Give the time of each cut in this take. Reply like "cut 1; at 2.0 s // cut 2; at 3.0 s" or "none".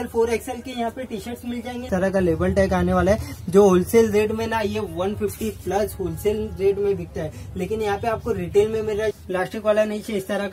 cut 1; at 1.9 s // cut 2; at 9.1 s